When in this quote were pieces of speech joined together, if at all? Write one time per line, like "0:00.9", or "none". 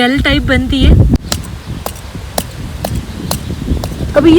0:01.2